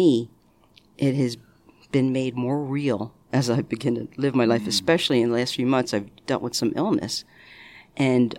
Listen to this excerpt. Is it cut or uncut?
uncut